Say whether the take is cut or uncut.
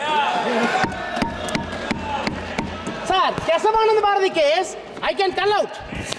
uncut